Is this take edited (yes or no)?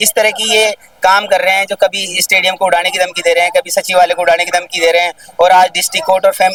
no